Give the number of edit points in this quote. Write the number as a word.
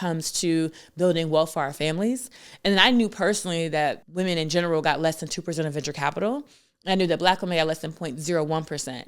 one